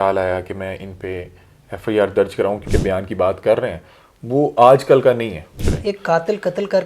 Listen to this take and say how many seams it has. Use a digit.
2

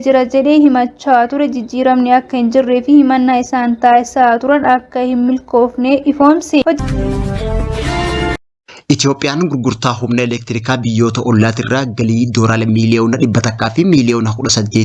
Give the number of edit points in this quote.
2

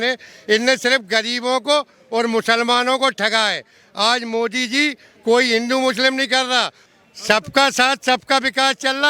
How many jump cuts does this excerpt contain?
1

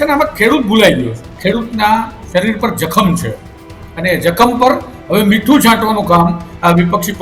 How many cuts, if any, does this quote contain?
1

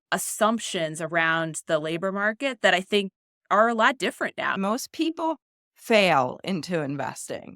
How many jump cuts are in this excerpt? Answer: 1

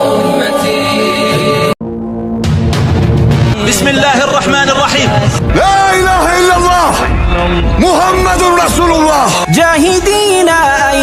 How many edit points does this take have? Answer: 0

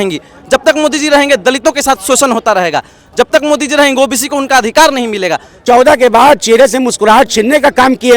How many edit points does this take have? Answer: 1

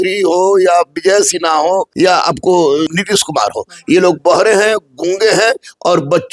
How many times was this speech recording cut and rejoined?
2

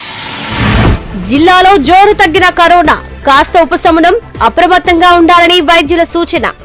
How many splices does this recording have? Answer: 1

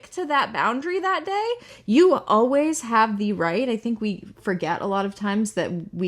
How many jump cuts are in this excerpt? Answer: 1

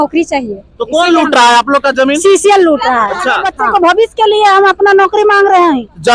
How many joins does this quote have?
1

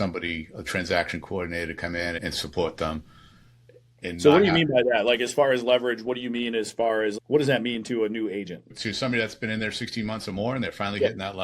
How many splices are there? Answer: 2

